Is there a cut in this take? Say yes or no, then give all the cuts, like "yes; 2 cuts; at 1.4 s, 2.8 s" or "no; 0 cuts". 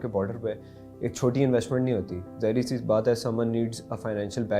no; 0 cuts